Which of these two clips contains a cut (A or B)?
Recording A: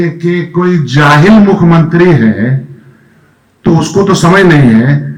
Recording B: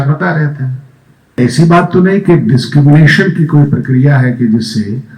B